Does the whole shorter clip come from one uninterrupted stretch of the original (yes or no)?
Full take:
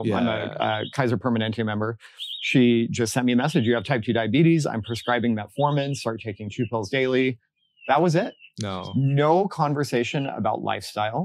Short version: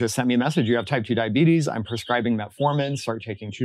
yes